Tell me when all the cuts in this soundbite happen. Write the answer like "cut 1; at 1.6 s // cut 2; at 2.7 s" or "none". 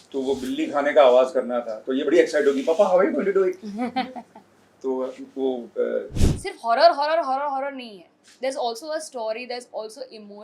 cut 1; at 6.1 s